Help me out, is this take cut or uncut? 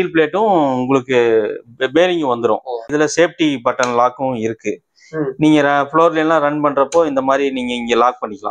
cut